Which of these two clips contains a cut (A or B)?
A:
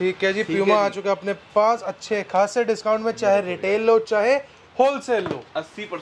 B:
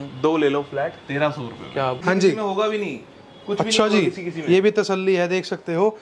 B